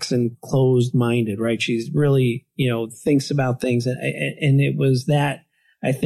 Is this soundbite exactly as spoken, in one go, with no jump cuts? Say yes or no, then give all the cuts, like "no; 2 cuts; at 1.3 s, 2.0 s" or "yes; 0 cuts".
yes; 0 cuts